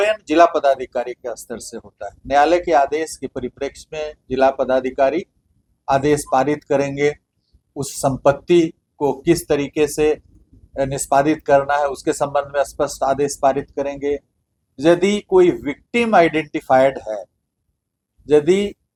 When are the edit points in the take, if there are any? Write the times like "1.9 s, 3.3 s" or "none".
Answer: none